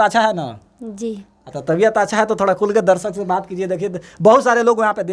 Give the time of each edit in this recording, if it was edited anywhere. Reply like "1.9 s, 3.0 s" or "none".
none

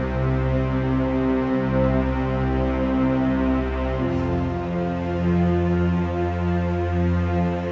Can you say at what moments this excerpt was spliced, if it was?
none

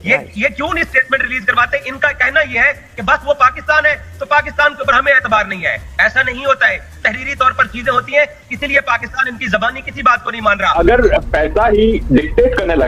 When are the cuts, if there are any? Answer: 10.7 s

